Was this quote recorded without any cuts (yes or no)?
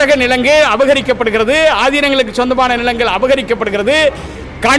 yes